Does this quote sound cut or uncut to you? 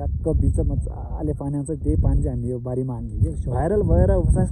cut